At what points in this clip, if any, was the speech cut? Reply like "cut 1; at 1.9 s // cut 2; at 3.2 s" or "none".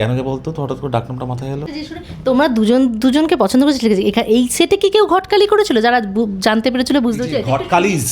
cut 1; at 1.7 s